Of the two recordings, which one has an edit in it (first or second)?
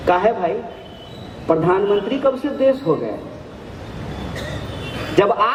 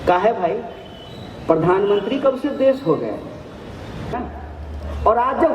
second